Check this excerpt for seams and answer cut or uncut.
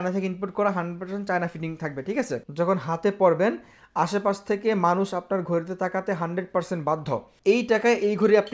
cut